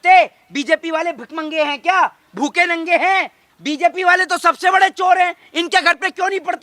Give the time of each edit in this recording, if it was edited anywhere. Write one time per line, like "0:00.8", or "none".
0:03.4